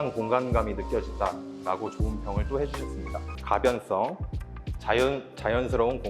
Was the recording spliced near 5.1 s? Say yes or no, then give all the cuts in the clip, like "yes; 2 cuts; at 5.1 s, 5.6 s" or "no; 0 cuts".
no; 1 cut; at 3.3 s